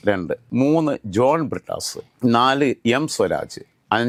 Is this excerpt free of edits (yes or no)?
yes